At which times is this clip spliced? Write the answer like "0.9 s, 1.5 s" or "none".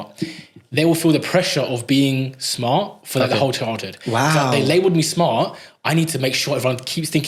none